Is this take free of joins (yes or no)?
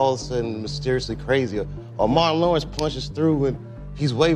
yes